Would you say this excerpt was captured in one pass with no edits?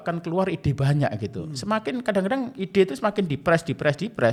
yes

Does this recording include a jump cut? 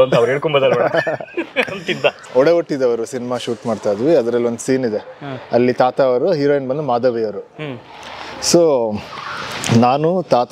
yes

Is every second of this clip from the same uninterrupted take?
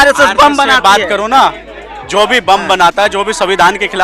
yes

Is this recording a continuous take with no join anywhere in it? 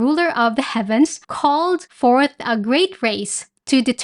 no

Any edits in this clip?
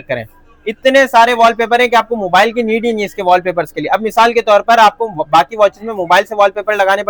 no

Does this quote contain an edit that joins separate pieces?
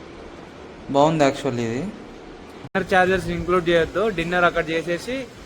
yes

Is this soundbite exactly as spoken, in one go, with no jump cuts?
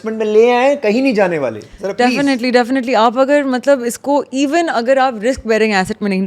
yes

